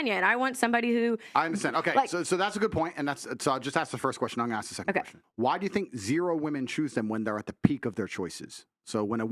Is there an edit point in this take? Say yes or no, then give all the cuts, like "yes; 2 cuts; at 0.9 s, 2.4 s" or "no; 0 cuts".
no; 0 cuts